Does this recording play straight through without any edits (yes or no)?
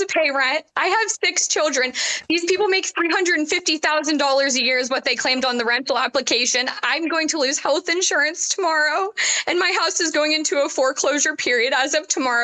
yes